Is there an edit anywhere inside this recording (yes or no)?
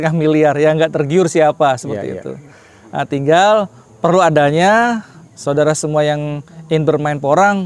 no